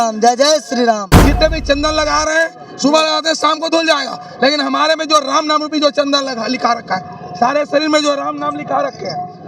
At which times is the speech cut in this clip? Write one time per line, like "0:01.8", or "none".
0:01.1